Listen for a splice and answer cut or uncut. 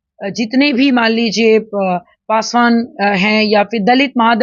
uncut